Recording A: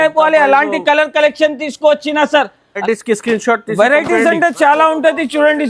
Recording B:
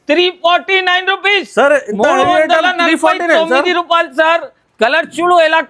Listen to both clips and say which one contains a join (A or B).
A